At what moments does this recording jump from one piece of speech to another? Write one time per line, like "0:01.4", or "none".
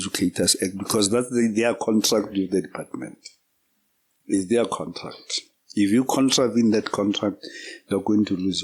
none